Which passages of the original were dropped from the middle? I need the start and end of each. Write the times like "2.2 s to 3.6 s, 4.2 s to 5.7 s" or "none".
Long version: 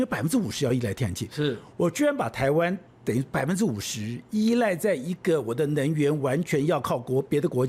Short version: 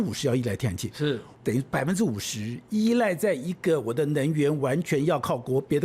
1.7 s to 2.9 s